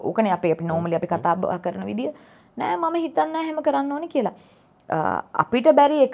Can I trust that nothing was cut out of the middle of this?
yes; 0 cuts

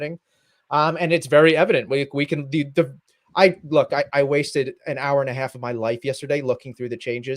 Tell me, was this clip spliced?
no; 0 cuts

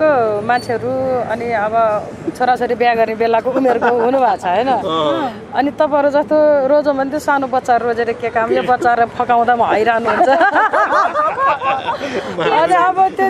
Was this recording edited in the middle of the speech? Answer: no; 0 cuts

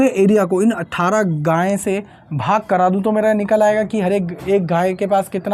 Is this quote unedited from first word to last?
yes; 0 cuts

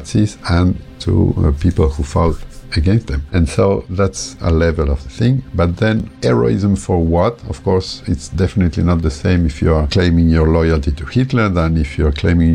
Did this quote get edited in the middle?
no; 0 cuts

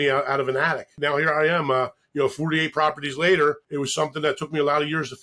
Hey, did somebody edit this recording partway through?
yes; 2 cuts; at 0.9 s, 3.6 s

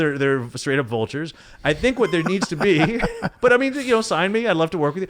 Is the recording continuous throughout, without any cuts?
yes; 0 cuts

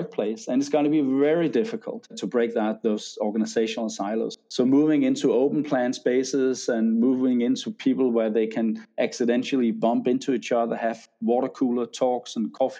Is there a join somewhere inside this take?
yes; 2 cuts; at 2.2 s, 4.3 s

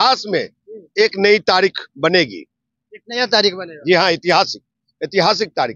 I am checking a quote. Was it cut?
no; 0 cuts

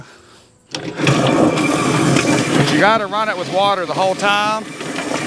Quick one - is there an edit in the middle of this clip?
no; 0 cuts

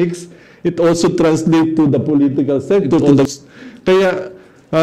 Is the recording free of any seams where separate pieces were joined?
no; 1 cut; at 3.3 s

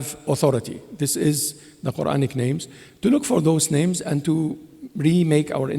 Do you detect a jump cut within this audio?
no; 0 cuts

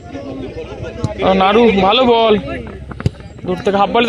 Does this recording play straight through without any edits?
yes; 0 cuts

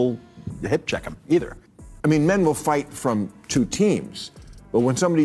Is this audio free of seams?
no; 1 cut; at 1.6 s

